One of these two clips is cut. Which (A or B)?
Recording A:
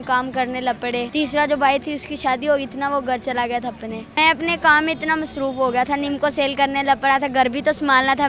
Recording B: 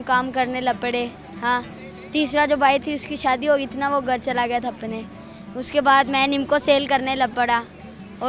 A